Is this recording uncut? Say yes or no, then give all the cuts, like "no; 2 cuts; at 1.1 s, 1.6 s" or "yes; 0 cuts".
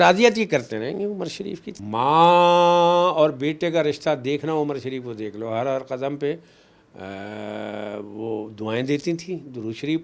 no; 1 cut; at 1.7 s